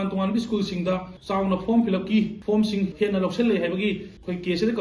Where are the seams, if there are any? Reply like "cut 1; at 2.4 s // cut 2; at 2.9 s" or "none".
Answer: cut 1; at 1.1 s // cut 2; at 2.7 s

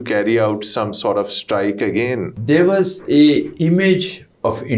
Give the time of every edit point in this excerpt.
cut 1; at 2.3 s

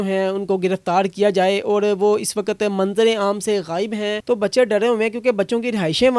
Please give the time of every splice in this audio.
cut 1; at 4.1 s

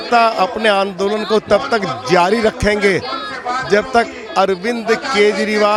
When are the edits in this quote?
none

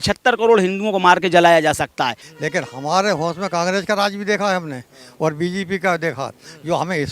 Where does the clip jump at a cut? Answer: cut 1; at 2.3 s

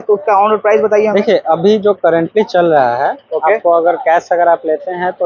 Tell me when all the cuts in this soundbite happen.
none

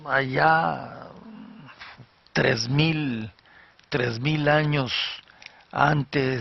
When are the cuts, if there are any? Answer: cut 1; at 1.6 s

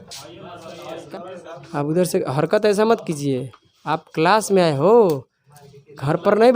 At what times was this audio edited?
cut 1; at 1.0 s

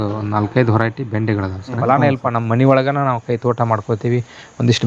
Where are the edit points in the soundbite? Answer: cut 1; at 1.8 s

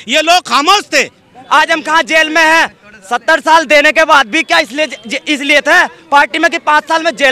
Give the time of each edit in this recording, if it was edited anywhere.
cut 1; at 1.4 s

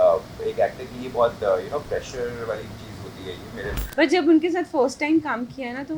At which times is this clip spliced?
cut 1; at 3.8 s

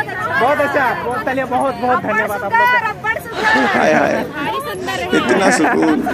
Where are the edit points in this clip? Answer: none

